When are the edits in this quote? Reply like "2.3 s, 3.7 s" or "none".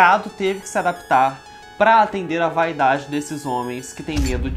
none